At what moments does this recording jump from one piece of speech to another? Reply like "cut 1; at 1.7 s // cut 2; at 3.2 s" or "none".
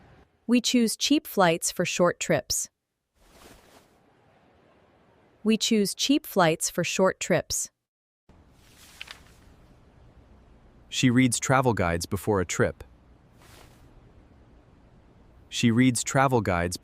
cut 1; at 8.3 s